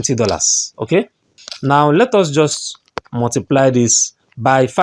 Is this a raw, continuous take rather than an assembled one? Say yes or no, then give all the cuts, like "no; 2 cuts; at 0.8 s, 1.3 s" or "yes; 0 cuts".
no; 1 cut; at 1.3 s